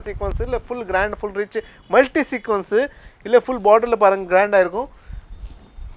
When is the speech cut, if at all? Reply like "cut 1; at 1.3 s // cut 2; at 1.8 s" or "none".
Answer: none